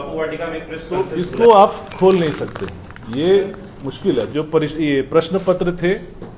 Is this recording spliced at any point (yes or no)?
yes